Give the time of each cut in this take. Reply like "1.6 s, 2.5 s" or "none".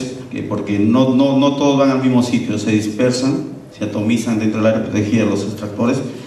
1.8 s